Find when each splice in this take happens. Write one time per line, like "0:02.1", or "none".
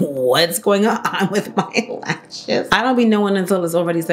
none